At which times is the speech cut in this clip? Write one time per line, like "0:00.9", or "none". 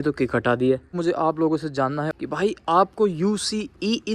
0:01.0
0:02.2